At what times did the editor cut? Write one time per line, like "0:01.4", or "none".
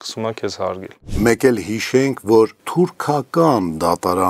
0:01.0
0:02.6